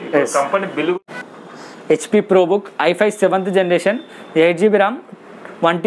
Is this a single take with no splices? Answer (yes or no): no